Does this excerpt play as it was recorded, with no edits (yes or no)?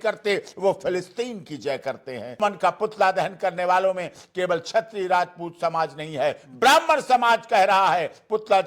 no